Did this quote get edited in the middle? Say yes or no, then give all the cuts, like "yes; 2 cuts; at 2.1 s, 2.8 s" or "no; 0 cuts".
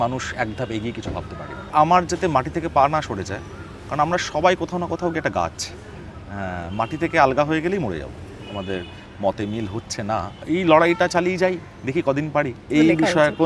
yes; 3 cuts; at 1.7 s, 8.4 s, 12.6 s